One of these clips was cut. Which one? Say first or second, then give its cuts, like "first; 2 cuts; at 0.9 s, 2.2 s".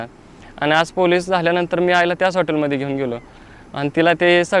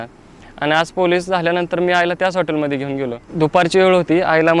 second; 1 cut; at 3.2 s